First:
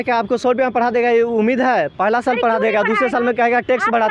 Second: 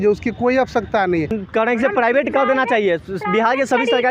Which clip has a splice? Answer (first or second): second